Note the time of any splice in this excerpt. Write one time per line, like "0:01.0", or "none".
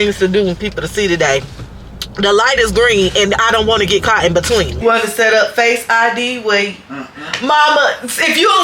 0:04.8

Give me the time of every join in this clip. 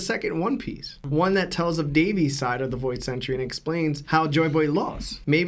none

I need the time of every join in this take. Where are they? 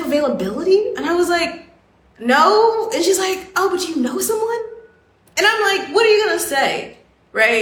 none

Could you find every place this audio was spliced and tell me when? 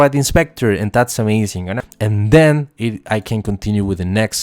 0:01.8

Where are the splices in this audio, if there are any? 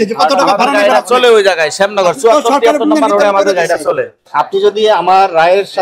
0:04.2

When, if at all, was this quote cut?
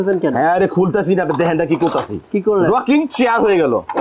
0:02.2

